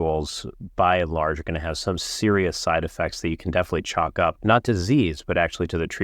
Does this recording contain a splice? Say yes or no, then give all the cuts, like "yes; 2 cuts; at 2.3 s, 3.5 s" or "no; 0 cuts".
yes; 1 cut; at 4.4 s